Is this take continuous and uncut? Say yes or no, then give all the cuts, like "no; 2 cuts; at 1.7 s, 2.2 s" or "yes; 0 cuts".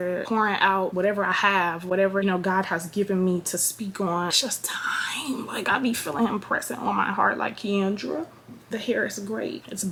yes; 0 cuts